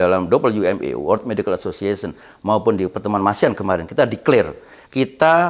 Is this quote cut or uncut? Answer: uncut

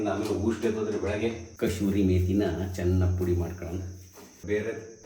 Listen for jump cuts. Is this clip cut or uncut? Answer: cut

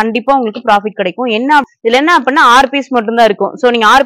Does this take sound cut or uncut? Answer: cut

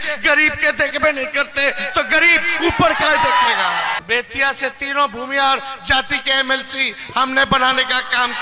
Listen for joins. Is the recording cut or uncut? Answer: cut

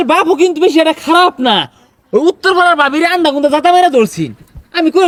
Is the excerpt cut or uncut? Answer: uncut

